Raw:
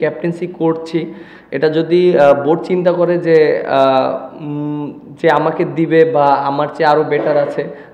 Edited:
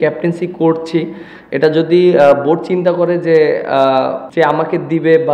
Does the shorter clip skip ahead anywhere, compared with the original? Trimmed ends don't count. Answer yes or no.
yes